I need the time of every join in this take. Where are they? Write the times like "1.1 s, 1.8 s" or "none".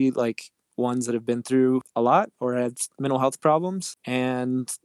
1.9 s, 3.9 s

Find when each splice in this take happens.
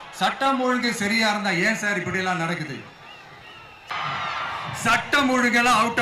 3.9 s

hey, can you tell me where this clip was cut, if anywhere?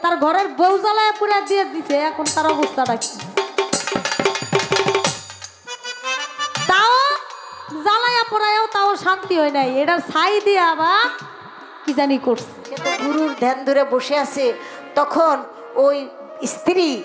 12.9 s

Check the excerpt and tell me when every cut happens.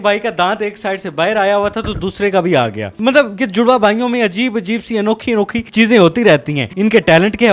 none

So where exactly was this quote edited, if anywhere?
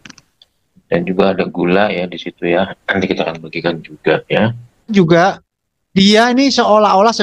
4.9 s

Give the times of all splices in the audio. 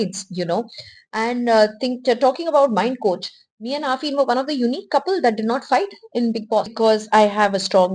6.7 s

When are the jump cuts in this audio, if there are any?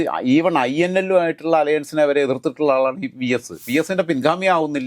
3.6 s

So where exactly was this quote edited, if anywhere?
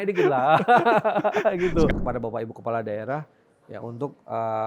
1.9 s

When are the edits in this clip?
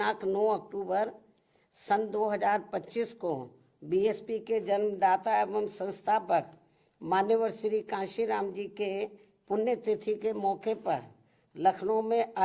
none

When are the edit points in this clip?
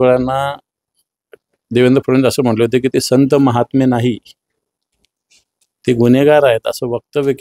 none

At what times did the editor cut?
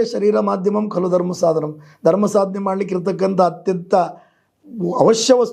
none

